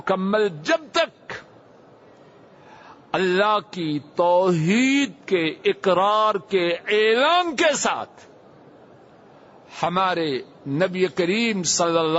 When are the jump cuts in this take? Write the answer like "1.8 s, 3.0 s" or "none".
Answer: none